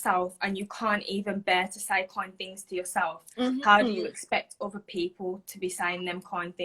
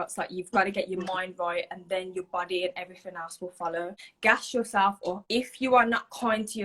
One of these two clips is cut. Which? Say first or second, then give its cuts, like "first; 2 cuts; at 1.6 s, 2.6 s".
second; 2 cuts; at 4.0 s, 5.2 s